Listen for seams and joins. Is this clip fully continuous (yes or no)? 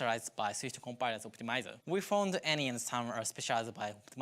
no